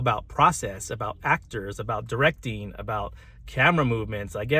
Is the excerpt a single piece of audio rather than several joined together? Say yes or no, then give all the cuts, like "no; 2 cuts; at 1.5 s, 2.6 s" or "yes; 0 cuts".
yes; 0 cuts